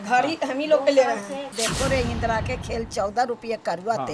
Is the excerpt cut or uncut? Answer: cut